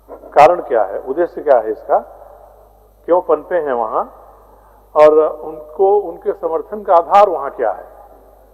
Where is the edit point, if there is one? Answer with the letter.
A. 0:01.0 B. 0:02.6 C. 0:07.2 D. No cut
D